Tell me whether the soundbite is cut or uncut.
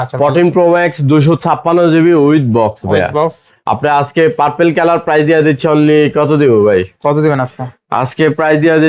uncut